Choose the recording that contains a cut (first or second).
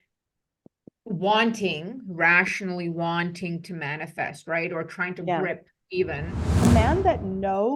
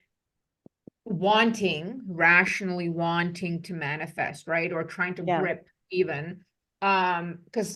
first